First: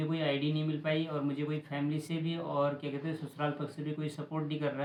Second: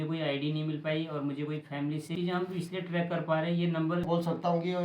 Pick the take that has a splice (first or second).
second